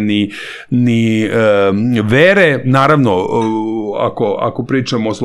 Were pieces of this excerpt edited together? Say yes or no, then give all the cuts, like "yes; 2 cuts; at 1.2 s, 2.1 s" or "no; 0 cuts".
no; 0 cuts